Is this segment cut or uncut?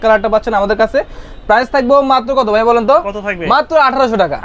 uncut